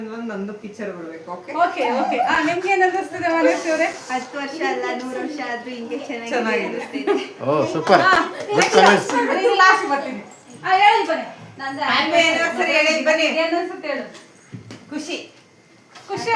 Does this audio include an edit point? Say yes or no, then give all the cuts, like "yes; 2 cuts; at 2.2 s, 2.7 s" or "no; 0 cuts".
no; 0 cuts